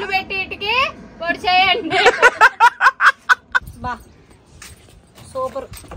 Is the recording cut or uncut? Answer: cut